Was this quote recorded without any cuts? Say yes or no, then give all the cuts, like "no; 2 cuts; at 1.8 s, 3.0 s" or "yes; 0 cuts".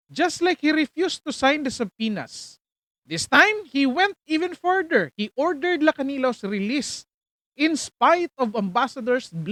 yes; 0 cuts